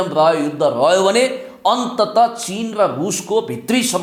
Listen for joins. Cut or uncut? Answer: uncut